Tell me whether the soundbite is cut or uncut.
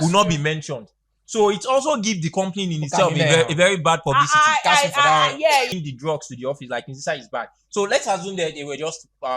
cut